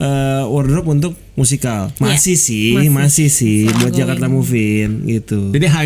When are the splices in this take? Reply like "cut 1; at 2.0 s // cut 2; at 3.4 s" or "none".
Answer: none